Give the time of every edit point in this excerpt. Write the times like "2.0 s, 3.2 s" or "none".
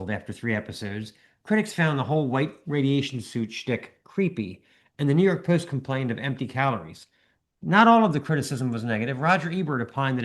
none